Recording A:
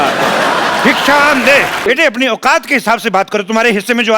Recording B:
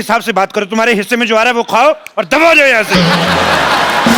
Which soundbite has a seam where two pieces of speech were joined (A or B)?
A